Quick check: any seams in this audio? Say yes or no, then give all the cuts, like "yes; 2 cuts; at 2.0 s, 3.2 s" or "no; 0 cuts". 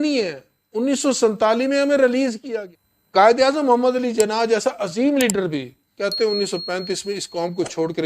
yes; 1 cut; at 2.5 s